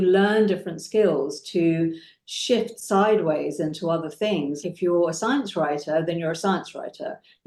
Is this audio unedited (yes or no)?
yes